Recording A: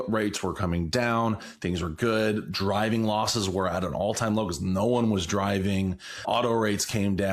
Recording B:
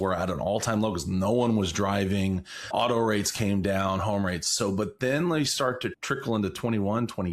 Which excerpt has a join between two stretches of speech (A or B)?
B